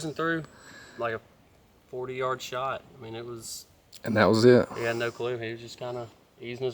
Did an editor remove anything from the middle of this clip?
no; 0 cuts

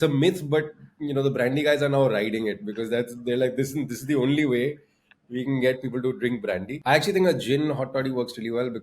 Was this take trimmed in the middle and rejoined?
yes; 1 cut; at 6.8 s

